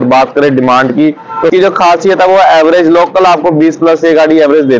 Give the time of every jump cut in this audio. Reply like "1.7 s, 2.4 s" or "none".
1.5 s